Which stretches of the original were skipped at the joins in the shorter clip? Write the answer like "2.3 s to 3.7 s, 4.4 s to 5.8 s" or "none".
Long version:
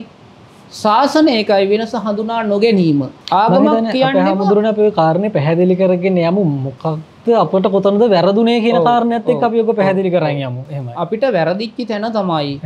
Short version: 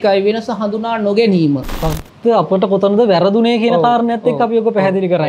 3.2 s to 6.7 s